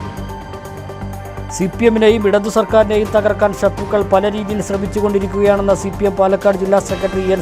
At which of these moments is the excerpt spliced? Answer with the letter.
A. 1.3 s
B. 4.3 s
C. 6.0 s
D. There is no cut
A